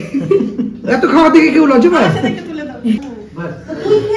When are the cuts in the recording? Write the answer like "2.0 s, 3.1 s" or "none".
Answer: 3.0 s